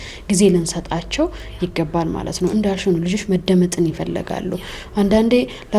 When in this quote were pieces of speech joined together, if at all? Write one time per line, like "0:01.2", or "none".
none